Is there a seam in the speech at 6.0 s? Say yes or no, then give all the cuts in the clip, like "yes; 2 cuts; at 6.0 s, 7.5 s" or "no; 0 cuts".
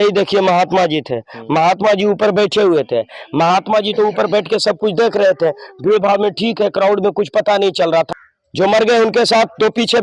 no; 1 cut; at 8.1 s